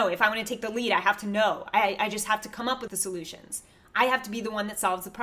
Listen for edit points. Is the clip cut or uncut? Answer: cut